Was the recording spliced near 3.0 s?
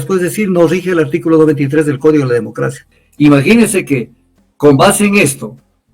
yes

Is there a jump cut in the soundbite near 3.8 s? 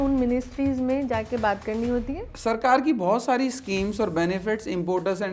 no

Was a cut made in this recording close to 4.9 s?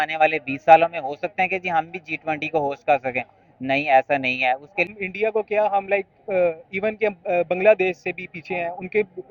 yes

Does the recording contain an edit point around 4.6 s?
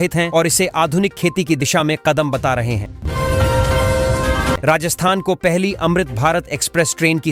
yes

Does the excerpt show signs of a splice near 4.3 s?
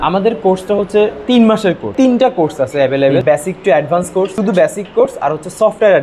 yes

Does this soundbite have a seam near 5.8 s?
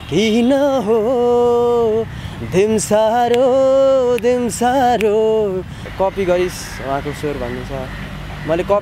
yes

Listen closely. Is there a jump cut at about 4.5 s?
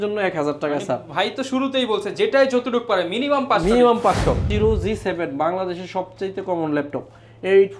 yes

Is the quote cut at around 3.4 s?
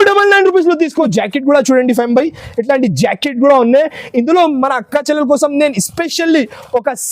no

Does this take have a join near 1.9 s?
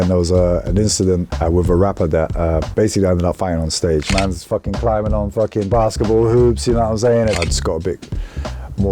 no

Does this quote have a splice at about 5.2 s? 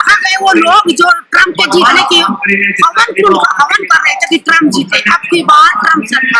no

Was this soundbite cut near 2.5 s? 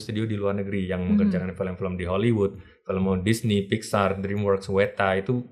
no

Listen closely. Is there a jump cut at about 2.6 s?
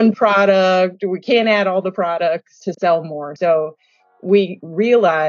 yes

